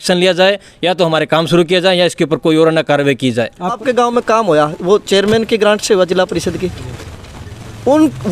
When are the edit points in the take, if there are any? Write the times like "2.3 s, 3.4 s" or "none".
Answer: 3.8 s